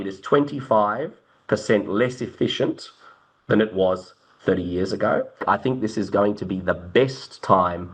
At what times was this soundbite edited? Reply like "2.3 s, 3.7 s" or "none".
5.4 s